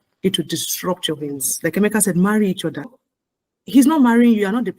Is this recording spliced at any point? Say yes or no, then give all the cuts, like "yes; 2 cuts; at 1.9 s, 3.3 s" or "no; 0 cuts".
yes; 2 cuts; at 1.5 s, 3.0 s